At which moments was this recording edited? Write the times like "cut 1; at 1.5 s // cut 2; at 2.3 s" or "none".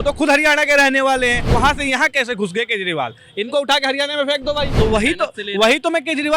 cut 1; at 1.4 s // cut 2; at 4.7 s